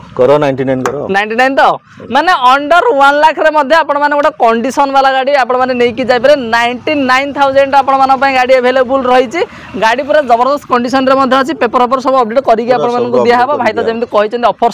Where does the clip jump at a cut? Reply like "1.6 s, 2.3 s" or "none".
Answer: none